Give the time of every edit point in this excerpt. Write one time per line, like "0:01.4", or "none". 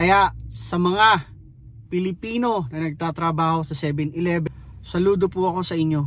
0:04.4